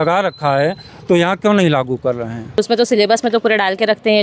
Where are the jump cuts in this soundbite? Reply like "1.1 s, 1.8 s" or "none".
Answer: 2.6 s